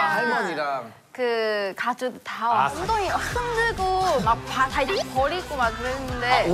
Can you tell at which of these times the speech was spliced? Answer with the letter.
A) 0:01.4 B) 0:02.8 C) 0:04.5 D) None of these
B